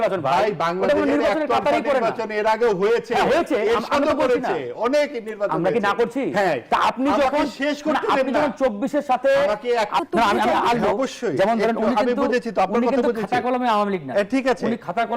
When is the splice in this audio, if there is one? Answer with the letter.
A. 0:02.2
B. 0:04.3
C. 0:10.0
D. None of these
C